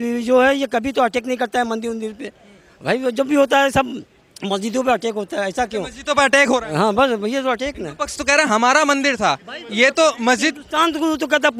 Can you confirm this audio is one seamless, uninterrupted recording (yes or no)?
yes